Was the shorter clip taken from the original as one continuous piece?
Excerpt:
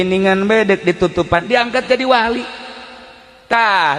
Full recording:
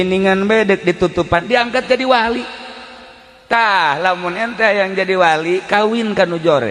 yes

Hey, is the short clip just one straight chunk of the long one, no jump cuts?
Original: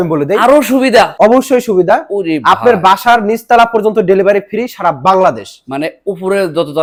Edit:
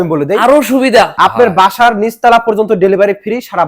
no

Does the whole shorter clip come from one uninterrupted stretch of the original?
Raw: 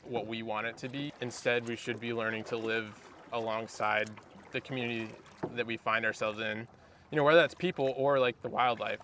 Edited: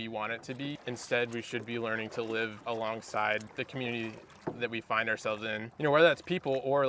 no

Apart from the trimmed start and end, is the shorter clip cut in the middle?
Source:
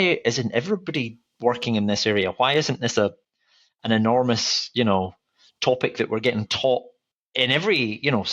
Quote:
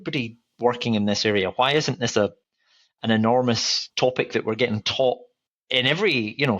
yes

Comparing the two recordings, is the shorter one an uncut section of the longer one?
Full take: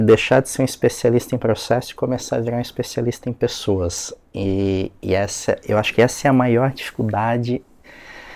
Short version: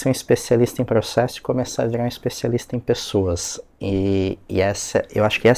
yes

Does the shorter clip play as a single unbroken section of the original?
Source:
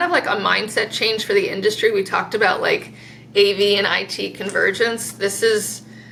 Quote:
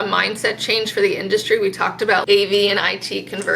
no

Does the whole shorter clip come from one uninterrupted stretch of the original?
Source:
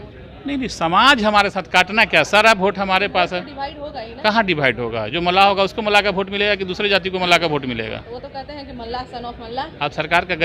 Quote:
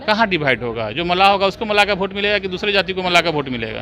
yes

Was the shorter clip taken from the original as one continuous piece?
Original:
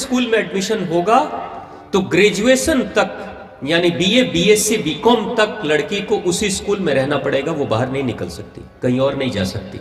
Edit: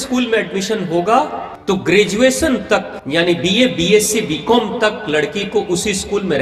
no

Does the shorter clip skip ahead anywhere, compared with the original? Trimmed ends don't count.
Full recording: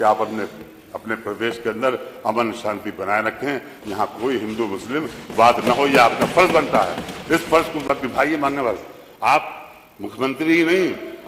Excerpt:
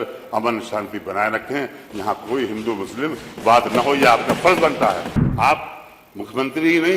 yes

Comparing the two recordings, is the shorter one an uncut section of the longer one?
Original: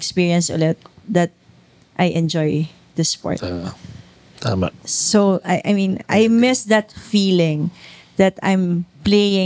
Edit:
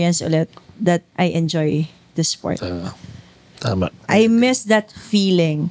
no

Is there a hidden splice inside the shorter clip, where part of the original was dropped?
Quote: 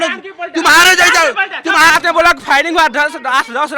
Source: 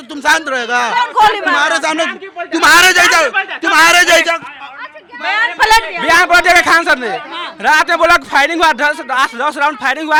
yes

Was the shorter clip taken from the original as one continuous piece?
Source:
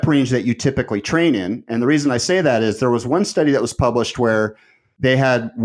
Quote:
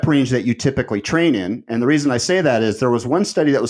yes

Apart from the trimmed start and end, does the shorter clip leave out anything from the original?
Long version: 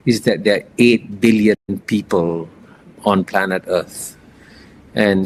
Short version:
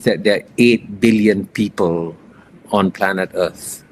yes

